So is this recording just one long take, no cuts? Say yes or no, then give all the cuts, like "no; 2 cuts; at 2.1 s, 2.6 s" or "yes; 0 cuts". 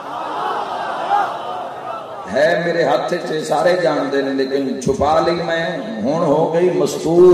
yes; 0 cuts